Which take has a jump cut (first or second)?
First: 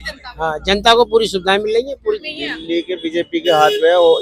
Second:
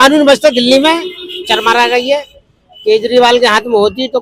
first